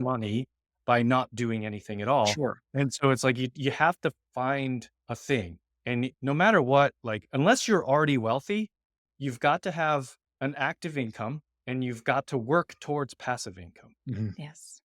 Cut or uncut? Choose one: cut